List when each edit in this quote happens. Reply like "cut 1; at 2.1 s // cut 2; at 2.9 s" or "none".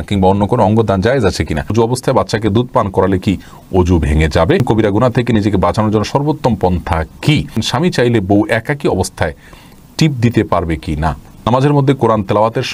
cut 1; at 1.7 s // cut 2; at 4.6 s // cut 3; at 7.6 s // cut 4; at 11.3 s